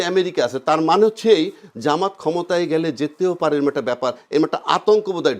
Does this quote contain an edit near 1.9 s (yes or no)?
no